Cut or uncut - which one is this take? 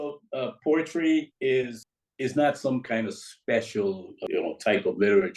cut